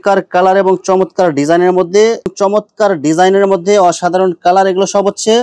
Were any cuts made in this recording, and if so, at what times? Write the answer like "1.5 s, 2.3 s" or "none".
2.3 s

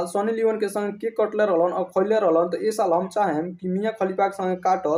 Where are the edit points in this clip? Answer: none

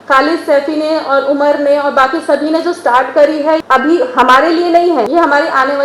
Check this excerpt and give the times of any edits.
3.6 s, 5.1 s

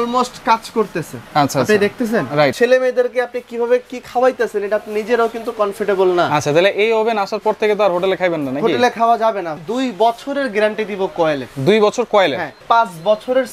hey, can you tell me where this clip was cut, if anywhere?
2.5 s, 9.5 s, 12.6 s

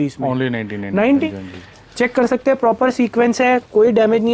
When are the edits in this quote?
1.3 s

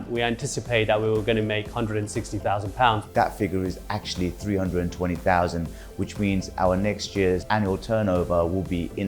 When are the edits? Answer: 3.0 s, 7.4 s

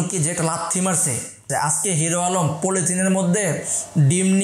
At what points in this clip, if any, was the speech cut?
1.4 s

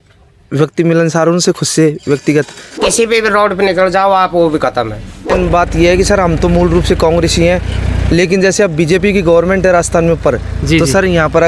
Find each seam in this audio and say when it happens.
2.8 s, 5.3 s

